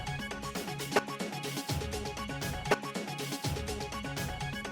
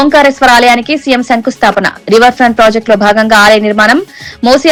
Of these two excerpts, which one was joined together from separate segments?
first; 1 cut; at 2.6 s

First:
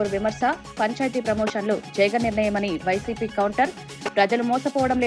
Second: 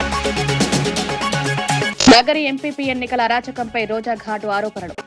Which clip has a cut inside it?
second; 1 cut; at 1.8 s

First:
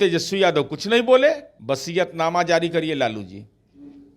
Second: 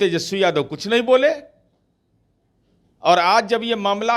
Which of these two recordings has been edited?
first; 1 cut; at 1.5 s

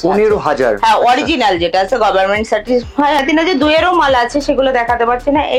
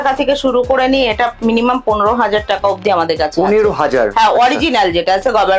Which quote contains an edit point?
first; 1 cut; at 3.2 s

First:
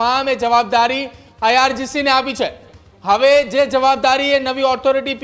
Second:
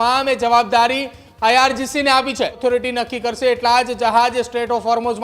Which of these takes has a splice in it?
second; 1 cut; at 2.6 s

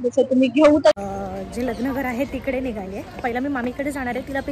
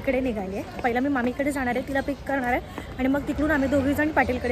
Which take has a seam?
first; 1 cut; at 1.0 s

